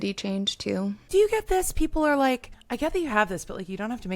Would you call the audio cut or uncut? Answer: cut